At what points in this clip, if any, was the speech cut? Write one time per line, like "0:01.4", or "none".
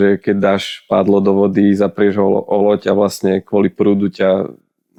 none